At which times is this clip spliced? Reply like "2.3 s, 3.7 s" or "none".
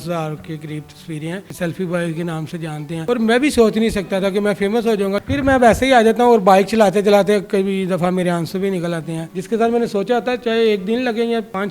1.5 s, 5.2 s, 9.3 s

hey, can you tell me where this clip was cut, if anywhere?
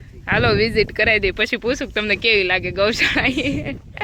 none

